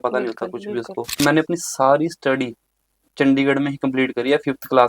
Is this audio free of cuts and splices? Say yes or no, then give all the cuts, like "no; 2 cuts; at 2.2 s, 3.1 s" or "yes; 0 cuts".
no; 1 cut; at 1.2 s